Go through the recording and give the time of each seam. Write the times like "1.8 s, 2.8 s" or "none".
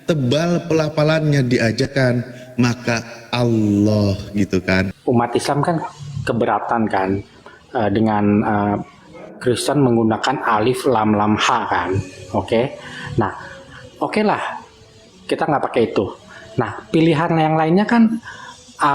4.9 s